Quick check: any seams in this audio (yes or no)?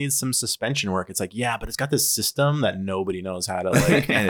no